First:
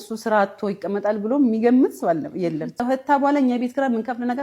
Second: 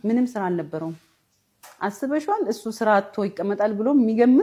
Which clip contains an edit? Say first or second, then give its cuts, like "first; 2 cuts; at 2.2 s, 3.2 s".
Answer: first; 1 cut; at 2.8 s